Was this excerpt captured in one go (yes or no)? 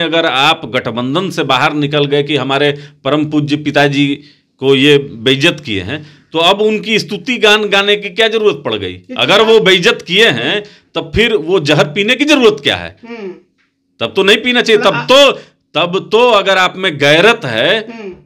yes